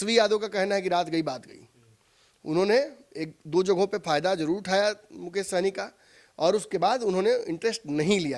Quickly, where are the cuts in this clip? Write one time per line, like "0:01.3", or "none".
none